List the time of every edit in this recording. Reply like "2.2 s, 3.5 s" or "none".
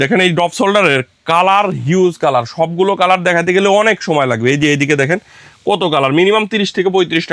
none